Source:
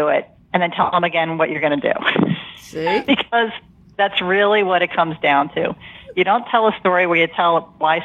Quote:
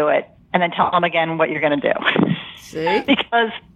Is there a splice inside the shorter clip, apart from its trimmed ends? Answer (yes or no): no